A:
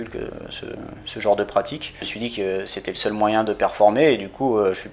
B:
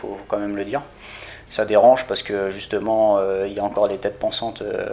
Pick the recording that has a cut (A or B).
A